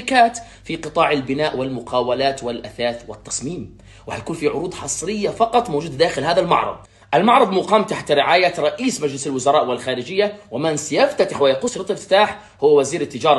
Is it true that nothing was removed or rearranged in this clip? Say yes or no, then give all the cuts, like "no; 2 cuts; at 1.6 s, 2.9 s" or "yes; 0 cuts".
no; 2 cuts; at 1.6 s, 11.7 s